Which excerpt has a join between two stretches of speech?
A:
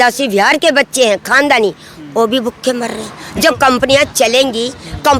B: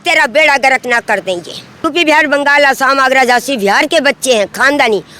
B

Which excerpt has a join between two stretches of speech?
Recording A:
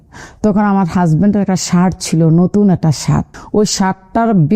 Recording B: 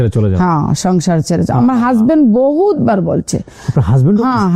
A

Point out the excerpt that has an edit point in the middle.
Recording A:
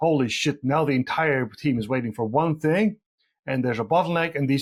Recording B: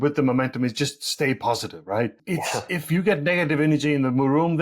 B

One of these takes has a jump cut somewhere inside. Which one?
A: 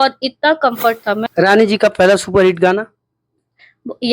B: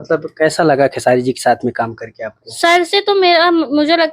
A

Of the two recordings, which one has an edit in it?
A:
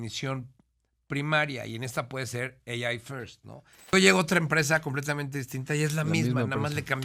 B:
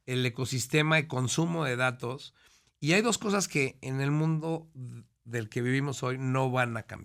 A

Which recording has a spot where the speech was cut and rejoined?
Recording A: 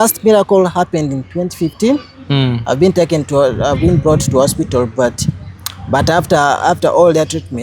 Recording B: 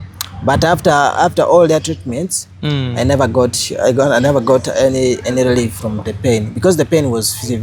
A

